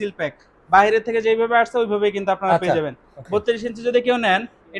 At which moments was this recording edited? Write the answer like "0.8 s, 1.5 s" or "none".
none

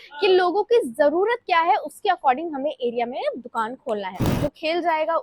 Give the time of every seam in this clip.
4.3 s

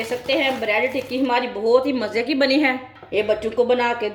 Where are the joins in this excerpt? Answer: none

